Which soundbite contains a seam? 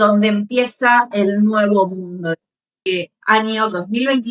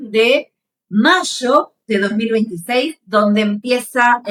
first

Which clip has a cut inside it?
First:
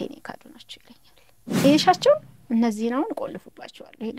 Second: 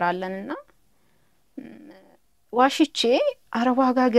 first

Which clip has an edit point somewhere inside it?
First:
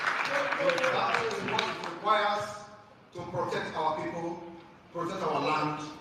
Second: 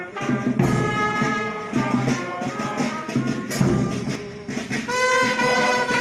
second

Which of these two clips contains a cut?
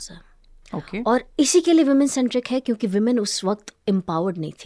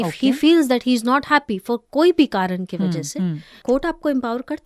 second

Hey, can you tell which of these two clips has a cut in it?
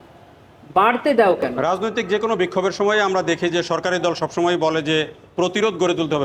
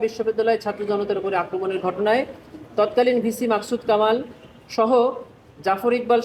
first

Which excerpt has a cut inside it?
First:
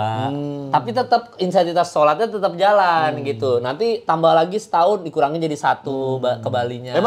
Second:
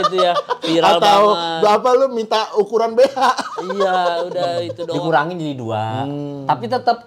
second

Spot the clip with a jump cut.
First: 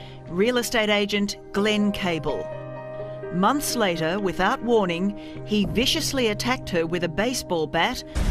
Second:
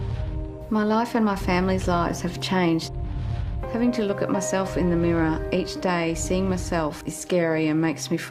second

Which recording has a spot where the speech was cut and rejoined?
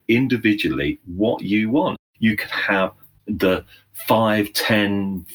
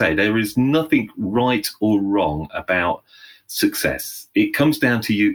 first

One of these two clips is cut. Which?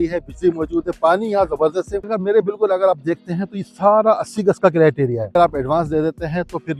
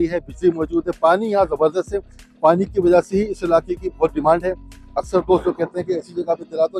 first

